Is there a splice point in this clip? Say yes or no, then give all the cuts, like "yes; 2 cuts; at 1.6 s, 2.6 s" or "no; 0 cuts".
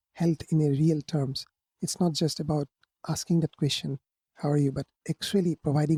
no; 0 cuts